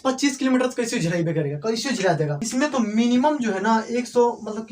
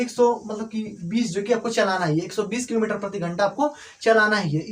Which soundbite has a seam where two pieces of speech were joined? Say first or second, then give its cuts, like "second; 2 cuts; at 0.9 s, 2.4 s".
first; 1 cut; at 2.4 s